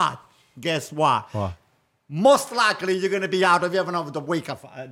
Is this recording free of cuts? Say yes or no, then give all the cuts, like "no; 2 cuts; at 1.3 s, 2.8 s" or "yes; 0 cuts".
yes; 0 cuts